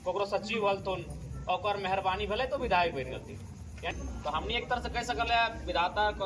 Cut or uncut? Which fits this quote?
cut